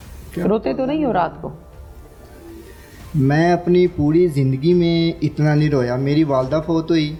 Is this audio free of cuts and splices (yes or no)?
yes